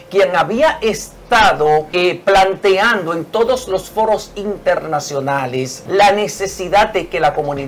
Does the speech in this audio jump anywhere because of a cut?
yes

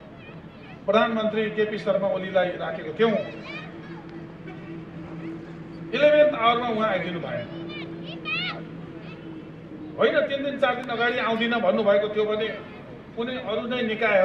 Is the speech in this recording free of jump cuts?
yes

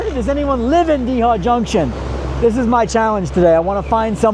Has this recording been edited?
no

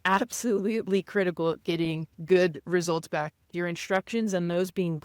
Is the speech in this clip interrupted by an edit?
yes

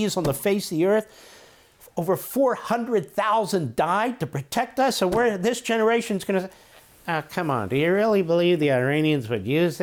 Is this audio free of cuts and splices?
yes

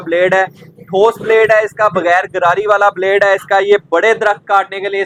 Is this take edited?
no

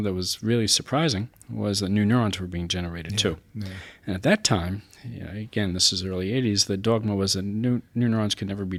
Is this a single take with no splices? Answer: yes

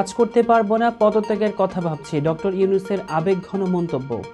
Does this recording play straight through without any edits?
yes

